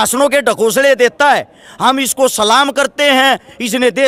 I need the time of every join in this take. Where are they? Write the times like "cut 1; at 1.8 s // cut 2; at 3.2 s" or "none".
none